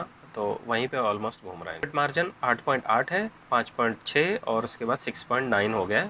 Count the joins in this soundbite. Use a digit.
0